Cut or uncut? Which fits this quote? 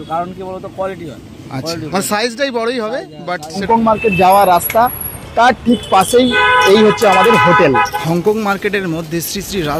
cut